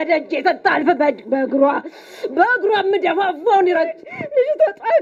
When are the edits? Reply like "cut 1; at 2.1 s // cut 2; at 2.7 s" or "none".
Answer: cut 1; at 4.1 s